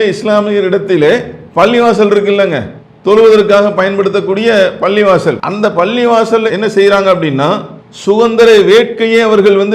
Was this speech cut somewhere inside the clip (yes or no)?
yes